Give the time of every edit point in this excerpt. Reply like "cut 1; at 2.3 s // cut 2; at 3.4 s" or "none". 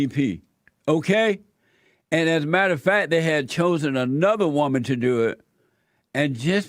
none